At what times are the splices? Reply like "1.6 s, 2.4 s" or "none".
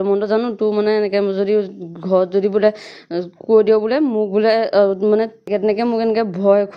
5.5 s